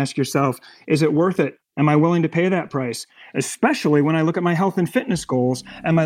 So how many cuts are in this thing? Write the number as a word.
one